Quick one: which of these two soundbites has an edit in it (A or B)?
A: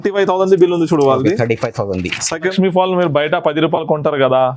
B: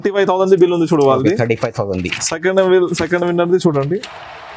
A